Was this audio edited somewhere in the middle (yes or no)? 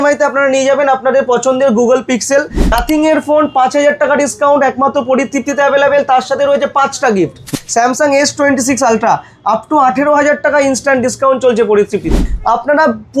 yes